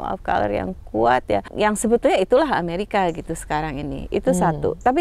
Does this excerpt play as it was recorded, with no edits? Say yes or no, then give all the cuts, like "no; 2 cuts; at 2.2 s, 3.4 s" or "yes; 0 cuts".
no; 1 cut; at 1.5 s